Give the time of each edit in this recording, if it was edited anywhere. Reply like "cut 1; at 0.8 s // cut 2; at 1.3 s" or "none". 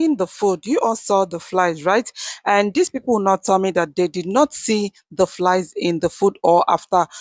none